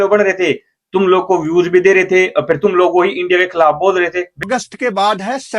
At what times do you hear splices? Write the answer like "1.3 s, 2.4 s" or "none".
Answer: 4.4 s